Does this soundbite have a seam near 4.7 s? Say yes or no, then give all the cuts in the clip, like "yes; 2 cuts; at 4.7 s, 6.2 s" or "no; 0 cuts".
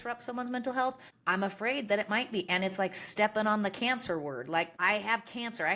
yes; 2 cuts; at 1.1 s, 4.7 s